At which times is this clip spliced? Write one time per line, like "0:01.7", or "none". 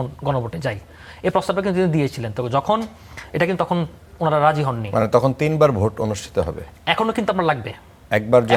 none